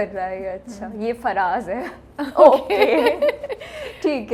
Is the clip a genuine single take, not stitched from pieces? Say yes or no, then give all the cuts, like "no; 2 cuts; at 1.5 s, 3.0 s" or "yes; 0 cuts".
yes; 0 cuts